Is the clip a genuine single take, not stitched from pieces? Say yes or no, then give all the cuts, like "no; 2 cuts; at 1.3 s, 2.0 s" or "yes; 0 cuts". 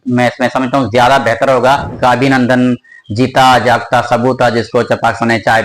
no; 1 cut; at 2.0 s